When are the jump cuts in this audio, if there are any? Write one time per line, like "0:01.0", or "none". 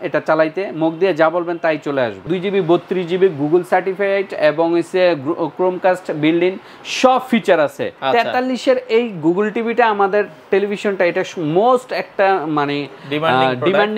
0:02.2
0:07.9